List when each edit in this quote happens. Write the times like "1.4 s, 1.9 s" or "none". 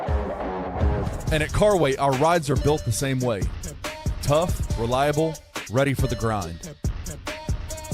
1.0 s